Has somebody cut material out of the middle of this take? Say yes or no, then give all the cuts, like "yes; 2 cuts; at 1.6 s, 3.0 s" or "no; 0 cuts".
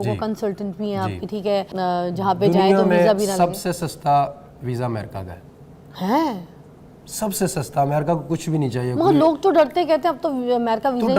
yes; 1 cut; at 1.7 s